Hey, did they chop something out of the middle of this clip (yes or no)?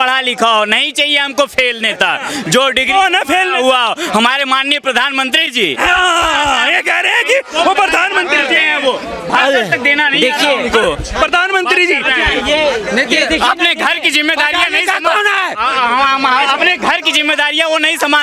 no